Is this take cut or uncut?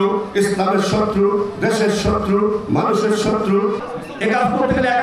cut